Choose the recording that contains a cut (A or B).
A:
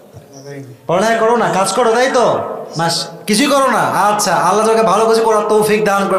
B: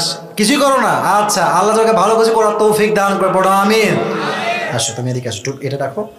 B